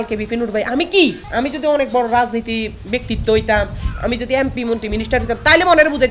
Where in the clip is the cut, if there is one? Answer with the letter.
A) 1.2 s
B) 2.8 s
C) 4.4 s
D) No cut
A